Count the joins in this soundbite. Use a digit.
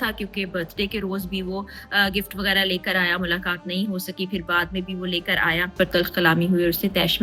1